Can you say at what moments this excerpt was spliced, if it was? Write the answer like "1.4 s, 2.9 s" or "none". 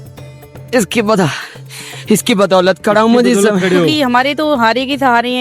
3.9 s